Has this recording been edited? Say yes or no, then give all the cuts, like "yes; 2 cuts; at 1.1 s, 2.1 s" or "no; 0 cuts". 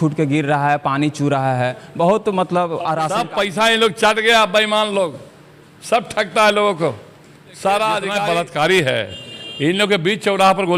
yes; 2 cuts; at 3.2 s, 8.1 s